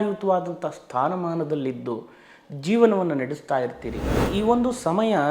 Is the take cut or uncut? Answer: cut